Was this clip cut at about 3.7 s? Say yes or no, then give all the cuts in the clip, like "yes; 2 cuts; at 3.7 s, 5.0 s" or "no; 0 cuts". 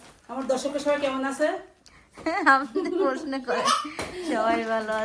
no; 0 cuts